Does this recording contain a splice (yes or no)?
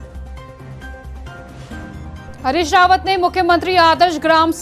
yes